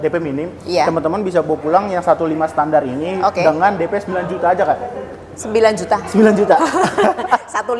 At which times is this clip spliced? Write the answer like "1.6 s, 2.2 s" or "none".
none